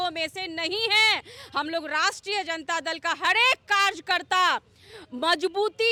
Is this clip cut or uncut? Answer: uncut